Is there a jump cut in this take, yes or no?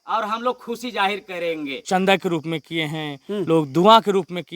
yes